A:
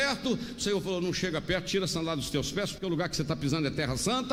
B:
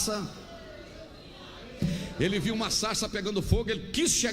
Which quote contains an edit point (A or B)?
B